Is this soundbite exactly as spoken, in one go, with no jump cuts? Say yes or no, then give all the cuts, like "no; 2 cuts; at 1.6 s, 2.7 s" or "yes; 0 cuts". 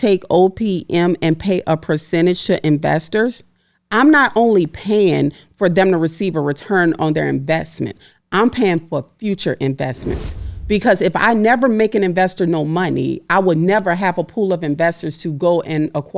yes; 0 cuts